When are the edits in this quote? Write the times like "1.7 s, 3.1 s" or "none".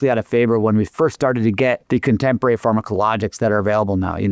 1.8 s